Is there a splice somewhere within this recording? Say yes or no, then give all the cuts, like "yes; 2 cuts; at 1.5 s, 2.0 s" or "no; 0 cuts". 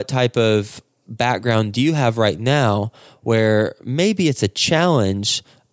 no; 0 cuts